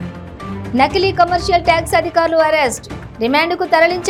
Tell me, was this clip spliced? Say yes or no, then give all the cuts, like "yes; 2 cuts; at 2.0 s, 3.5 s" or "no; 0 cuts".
no; 0 cuts